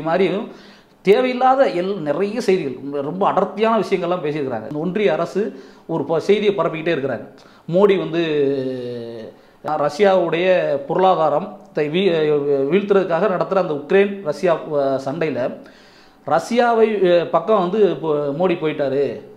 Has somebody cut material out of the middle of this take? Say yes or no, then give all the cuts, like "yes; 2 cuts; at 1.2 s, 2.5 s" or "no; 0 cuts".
yes; 2 cuts; at 4.7 s, 9.7 s